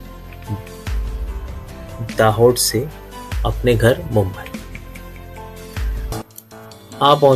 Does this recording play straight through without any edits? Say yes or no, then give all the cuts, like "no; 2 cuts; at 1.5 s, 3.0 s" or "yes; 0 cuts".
no; 1 cut; at 6.1 s